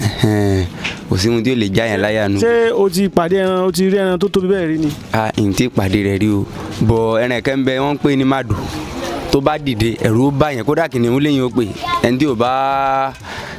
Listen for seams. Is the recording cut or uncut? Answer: uncut